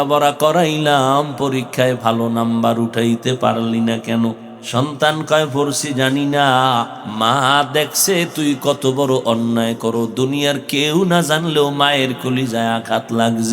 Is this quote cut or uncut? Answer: cut